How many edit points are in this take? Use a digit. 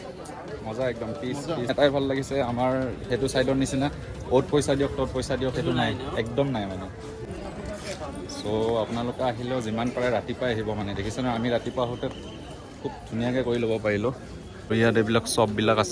3